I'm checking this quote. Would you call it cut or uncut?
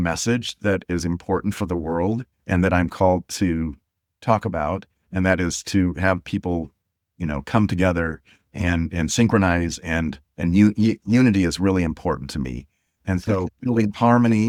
uncut